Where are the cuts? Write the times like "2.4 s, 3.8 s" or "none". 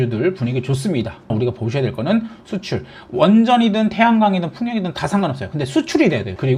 1.3 s, 2.4 s